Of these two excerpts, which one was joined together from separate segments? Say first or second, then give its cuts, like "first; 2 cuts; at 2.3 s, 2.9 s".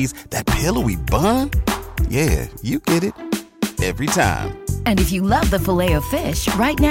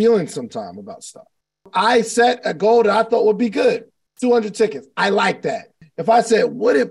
second; 2 cuts; at 1.7 s, 5.7 s